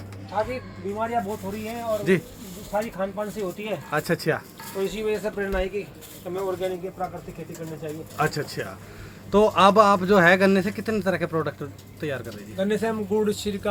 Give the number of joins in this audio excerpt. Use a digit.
0